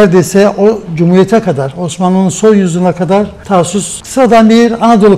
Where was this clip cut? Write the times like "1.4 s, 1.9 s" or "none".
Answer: 4.0 s